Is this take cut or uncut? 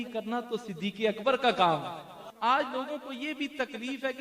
cut